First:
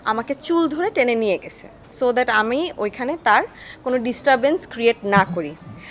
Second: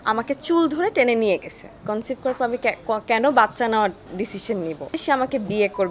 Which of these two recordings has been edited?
second; 2 cuts; at 1.8 s, 4.9 s

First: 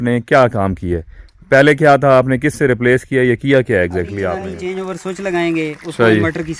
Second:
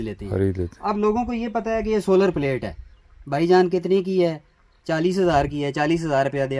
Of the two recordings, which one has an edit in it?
first; 1 cut; at 4.5 s

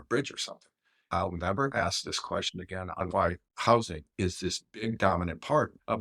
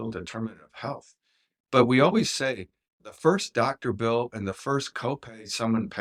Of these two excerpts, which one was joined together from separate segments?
first; 2 cuts; at 1.1 s, 3.0 s

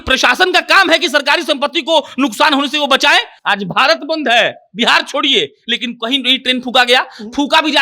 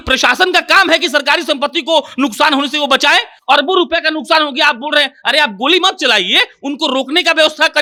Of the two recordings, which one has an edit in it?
first; 1 cut; at 3.4 s

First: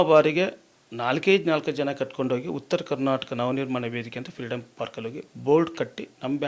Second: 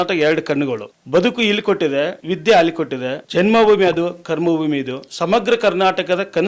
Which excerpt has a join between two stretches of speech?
second; 4 cuts; at 0.9 s, 2.2 s, 3.2 s, 5.0 s

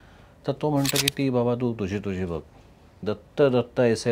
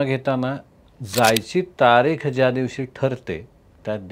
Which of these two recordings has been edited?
first; 1 cut; at 3.0 s

